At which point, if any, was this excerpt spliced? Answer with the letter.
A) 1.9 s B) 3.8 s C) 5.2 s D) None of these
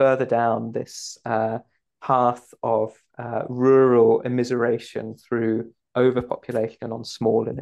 A